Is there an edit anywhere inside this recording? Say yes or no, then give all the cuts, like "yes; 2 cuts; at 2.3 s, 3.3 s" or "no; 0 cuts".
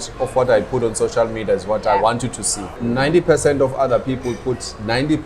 yes; 1 cut; at 2.7 s